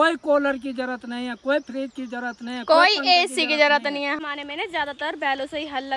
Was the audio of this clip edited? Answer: yes; 1 cut; at 4.2 s

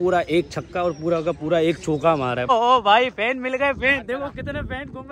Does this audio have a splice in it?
yes; 1 cut; at 2.5 s

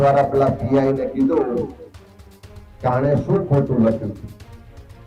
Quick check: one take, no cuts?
yes; 0 cuts

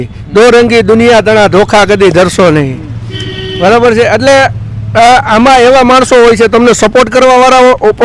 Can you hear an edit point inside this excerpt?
no; 0 cuts

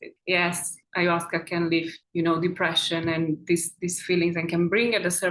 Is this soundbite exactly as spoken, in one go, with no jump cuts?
yes; 0 cuts

